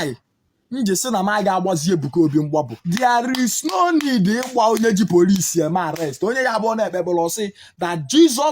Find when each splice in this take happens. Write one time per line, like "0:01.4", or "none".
0:02.8